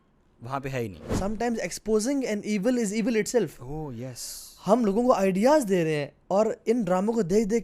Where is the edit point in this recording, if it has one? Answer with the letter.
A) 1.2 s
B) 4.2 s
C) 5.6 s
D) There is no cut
A